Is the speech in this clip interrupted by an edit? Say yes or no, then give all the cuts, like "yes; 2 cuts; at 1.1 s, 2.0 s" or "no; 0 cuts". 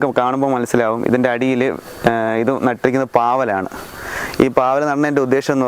no; 0 cuts